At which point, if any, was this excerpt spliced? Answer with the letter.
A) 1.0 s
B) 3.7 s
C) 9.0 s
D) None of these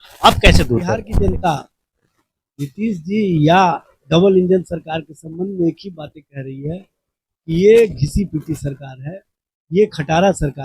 A